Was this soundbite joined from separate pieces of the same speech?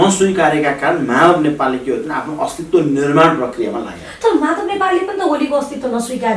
no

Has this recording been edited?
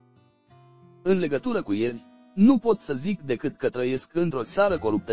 yes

